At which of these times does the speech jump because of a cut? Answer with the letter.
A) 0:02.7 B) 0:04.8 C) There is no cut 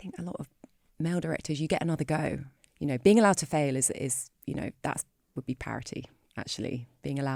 A